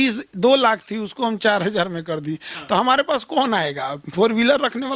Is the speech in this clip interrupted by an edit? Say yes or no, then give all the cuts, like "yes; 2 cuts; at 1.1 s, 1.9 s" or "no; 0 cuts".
no; 0 cuts